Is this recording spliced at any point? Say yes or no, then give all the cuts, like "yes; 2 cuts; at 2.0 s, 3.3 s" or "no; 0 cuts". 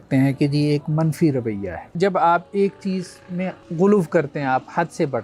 yes; 2 cuts; at 1.9 s, 3.6 s